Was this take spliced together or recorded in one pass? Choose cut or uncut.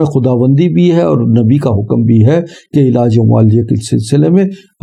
uncut